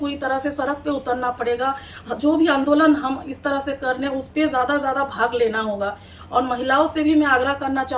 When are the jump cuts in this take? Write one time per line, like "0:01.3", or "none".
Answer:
none

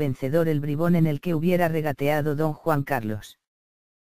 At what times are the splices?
none

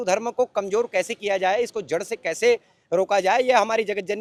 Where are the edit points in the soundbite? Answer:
none

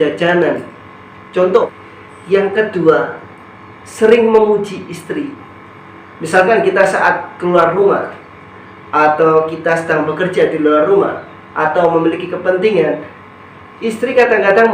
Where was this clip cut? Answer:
0:01.7

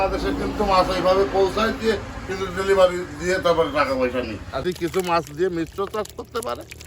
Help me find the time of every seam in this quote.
0:04.6

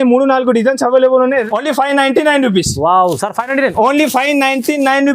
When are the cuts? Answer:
0:01.4

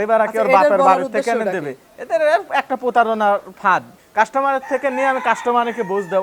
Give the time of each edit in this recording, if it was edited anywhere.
0:04.0

